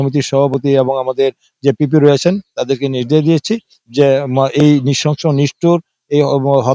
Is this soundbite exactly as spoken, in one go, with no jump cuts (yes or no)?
yes